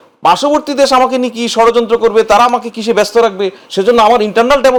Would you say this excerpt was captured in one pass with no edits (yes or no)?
yes